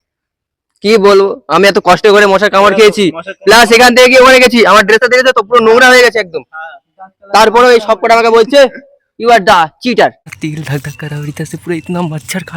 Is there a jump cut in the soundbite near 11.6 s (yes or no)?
no